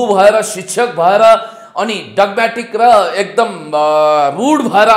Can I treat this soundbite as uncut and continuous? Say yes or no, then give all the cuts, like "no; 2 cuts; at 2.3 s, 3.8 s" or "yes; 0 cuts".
yes; 0 cuts